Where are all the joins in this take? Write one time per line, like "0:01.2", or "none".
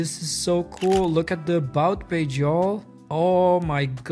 0:02.9